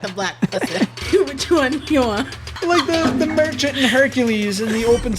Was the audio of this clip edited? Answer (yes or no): yes